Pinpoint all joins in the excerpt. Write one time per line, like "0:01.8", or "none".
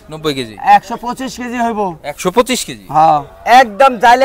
0:03.3